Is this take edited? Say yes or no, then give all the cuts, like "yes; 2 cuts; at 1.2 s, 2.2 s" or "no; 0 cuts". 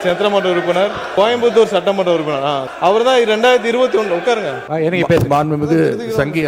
yes; 3 cuts; at 1.0 s, 2.7 s, 4.6 s